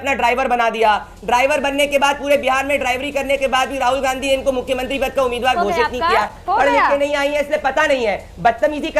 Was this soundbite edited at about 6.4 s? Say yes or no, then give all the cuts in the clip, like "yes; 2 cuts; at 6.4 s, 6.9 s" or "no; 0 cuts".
yes; 1 cut; at 6.4 s